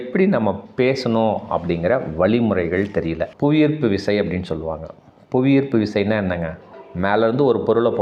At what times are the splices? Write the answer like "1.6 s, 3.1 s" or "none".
3.3 s